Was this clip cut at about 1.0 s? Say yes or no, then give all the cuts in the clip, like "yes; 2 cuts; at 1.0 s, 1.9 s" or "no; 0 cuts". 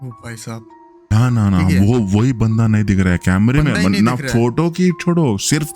yes; 1 cut; at 1.0 s